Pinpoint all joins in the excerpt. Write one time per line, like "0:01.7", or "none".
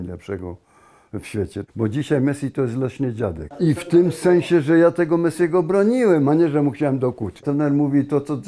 0:01.6
0:03.5
0:07.4